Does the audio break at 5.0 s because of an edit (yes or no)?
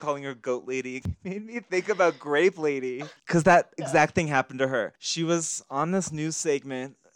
yes